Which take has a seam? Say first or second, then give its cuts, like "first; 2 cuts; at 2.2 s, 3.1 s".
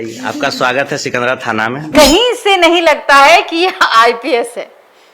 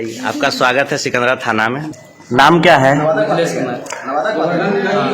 first; 1 cut; at 1.9 s